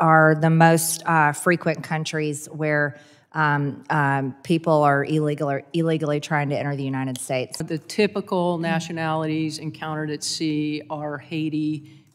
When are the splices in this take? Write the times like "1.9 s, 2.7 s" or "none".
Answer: 7.6 s